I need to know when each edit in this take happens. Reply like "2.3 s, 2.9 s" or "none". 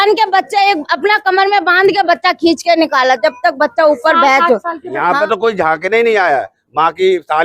4.9 s